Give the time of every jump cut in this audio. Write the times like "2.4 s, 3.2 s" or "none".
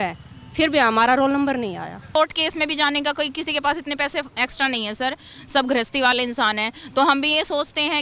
2.1 s